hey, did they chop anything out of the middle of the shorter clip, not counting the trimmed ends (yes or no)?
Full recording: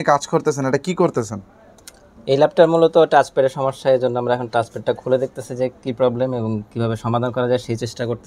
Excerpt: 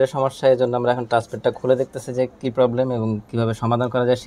no